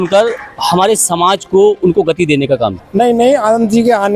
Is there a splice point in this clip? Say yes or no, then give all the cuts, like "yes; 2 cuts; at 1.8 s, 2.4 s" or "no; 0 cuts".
yes; 1 cut; at 2.8 s